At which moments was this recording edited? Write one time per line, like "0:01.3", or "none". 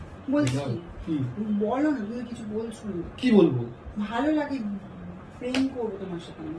none